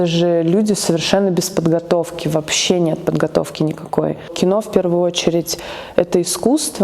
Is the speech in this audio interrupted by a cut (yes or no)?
yes